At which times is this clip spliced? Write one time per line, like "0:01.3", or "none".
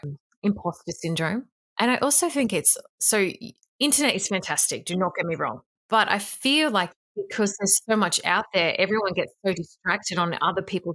0:01.7